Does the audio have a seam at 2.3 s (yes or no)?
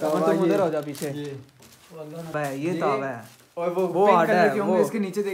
yes